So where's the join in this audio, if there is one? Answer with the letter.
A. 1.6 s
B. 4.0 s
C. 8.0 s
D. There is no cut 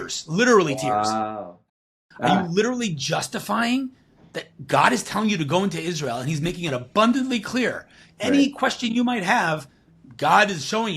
A